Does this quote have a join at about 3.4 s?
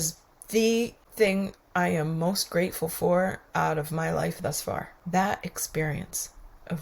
no; 2 cuts; at 1.0 s, 4.9 s

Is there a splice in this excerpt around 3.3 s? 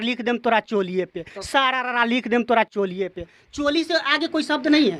no; 0 cuts

